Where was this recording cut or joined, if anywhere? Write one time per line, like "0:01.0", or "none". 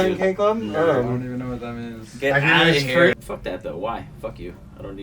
0:03.1